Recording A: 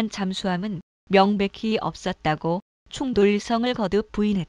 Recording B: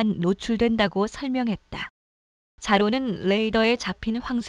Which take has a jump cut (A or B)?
A